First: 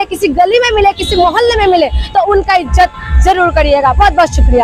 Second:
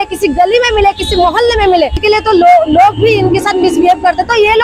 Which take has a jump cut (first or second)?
second